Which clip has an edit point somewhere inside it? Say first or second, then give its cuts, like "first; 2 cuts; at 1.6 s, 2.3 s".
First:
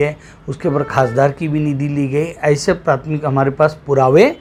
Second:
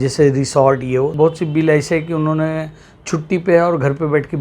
second; 1 cut; at 1.1 s